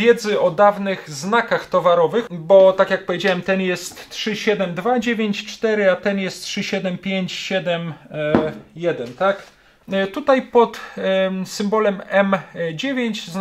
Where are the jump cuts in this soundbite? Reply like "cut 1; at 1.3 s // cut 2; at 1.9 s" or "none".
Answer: cut 1; at 2.3 s // cut 2; at 9.7 s